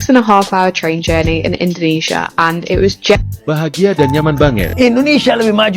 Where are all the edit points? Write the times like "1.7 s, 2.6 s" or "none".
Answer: 4.7 s